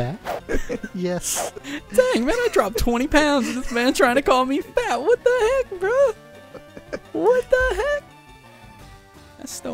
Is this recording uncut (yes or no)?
yes